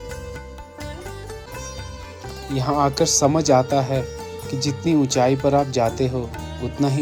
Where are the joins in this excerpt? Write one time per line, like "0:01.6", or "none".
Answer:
0:01.5